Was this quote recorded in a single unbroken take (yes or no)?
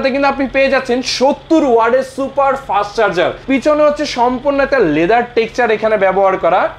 no